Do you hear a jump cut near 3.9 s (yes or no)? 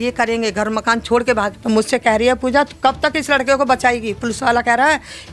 no